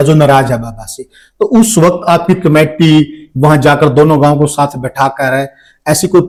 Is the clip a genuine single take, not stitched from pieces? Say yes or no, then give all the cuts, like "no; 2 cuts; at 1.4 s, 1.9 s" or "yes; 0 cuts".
yes; 0 cuts